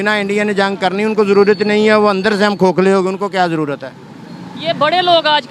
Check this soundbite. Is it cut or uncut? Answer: uncut